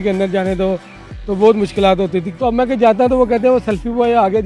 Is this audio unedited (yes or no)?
no